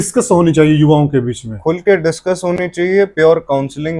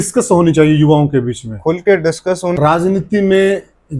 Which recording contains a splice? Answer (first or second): second